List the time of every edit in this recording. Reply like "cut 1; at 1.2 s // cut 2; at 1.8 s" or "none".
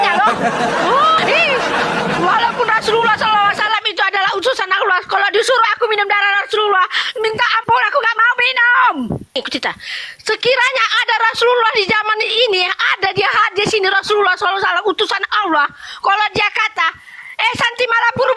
cut 1; at 1.2 s // cut 2; at 9.3 s